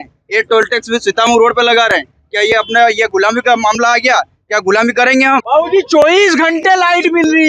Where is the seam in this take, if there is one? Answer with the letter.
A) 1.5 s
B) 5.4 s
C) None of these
B